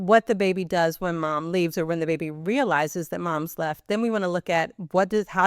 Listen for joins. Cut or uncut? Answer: uncut